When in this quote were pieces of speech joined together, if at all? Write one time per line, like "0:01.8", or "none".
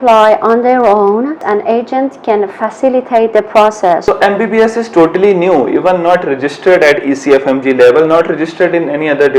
0:01.4
0:04.1